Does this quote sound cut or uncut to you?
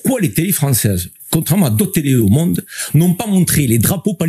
cut